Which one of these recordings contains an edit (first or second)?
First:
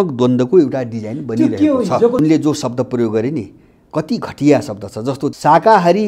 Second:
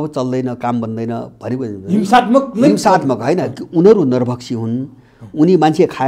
first